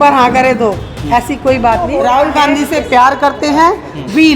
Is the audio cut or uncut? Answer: cut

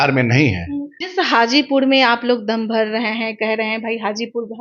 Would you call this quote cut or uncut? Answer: cut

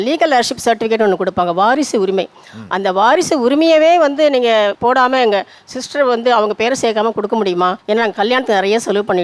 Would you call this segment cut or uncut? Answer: cut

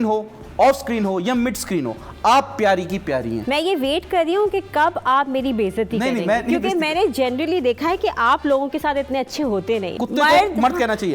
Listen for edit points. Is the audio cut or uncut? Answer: cut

